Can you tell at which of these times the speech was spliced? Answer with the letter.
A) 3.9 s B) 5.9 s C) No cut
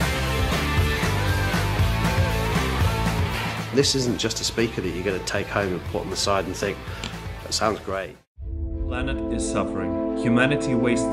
A